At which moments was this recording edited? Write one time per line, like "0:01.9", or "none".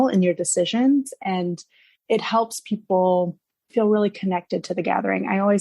0:02.0